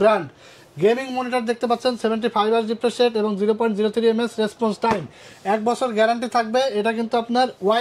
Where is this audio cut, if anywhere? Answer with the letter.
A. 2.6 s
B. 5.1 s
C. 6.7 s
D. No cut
D